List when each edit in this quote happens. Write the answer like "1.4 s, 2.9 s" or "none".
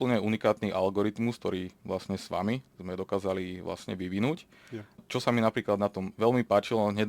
5.0 s